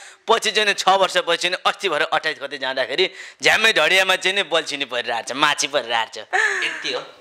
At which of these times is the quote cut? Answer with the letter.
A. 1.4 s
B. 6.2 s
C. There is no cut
B